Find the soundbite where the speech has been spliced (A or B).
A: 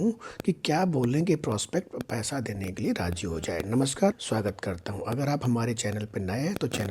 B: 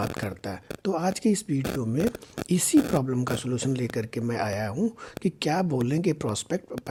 A